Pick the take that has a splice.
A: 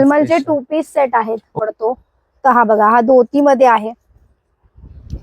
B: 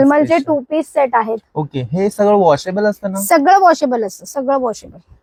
A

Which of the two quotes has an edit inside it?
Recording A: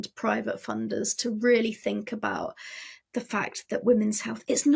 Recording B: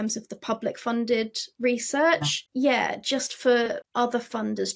B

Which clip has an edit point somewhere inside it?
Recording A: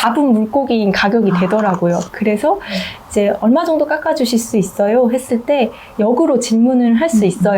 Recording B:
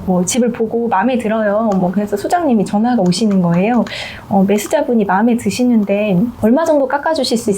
B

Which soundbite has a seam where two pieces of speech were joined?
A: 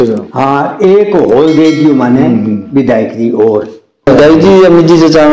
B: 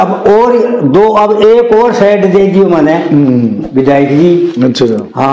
A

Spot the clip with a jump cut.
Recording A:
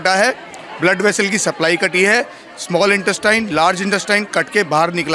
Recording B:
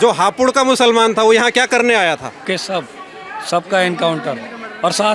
B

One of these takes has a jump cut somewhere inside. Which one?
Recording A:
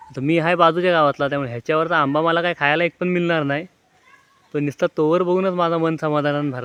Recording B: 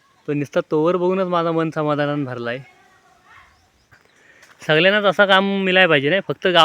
B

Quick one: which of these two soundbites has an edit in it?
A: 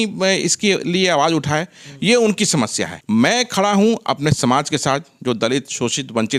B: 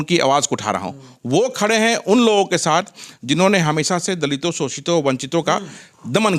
A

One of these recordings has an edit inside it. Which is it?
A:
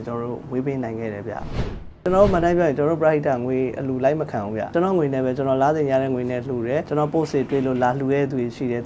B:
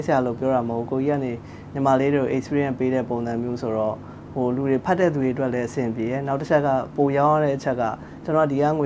A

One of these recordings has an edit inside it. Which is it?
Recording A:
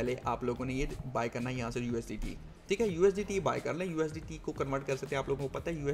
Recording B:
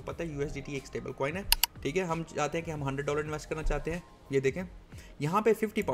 B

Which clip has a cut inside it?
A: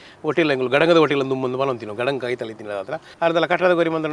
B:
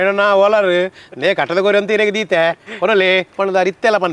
A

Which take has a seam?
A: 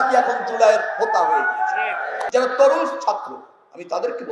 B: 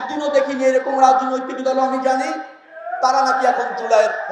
A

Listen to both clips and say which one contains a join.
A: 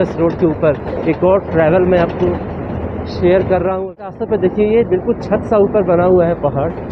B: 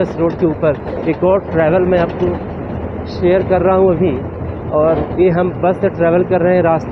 A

